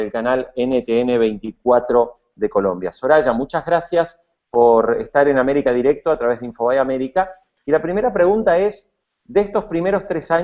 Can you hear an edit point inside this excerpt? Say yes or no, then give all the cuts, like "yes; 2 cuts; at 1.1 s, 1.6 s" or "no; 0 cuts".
no; 0 cuts